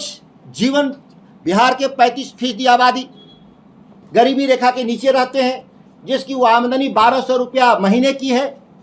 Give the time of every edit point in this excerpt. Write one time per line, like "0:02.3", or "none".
none